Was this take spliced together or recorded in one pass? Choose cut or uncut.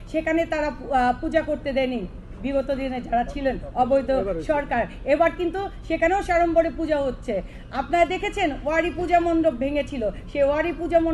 uncut